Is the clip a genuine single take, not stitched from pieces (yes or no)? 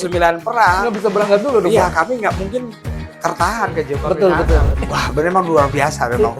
no